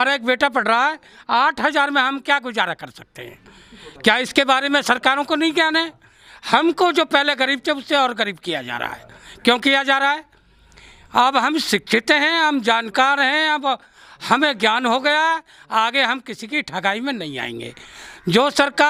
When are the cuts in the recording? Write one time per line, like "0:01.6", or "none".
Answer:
none